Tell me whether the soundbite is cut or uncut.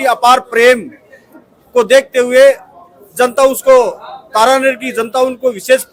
uncut